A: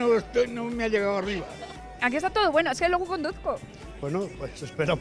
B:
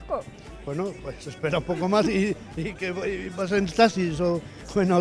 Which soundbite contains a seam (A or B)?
A